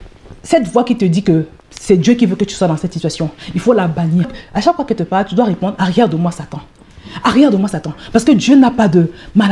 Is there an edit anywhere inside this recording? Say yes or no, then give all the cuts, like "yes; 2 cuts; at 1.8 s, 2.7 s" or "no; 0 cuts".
no; 0 cuts